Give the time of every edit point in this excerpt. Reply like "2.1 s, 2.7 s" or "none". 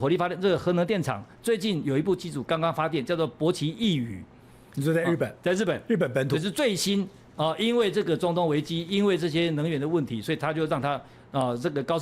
none